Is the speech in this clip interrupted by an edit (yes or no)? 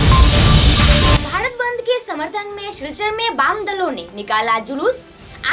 yes